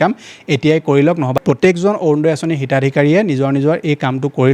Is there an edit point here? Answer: yes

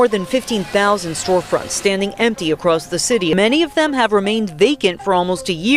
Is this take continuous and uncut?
no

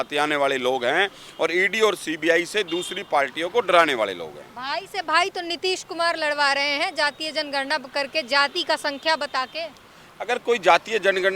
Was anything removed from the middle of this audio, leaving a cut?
no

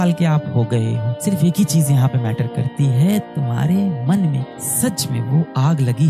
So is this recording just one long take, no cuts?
no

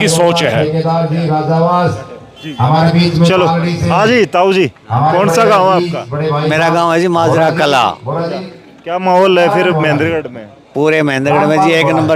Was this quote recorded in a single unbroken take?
yes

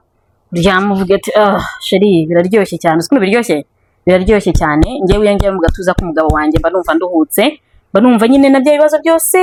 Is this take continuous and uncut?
yes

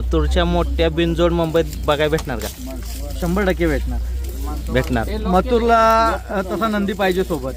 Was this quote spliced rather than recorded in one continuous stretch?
no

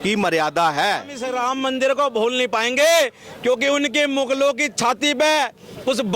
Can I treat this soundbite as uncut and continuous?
no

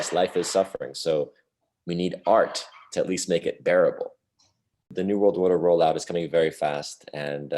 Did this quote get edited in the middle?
yes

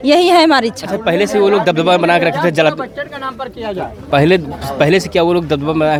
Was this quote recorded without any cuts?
yes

